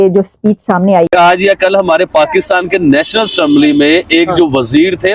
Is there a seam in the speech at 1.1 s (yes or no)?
yes